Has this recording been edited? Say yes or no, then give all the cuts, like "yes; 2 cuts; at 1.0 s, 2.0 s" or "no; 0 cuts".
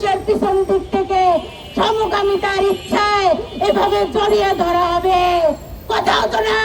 no; 0 cuts